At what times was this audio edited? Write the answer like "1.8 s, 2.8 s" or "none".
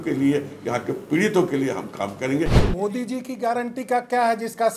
2.6 s